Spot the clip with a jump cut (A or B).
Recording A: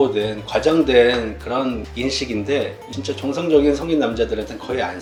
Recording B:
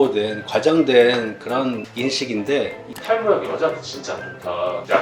B